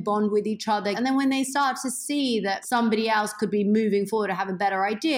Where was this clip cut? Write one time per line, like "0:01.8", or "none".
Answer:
0:01.0
0:02.6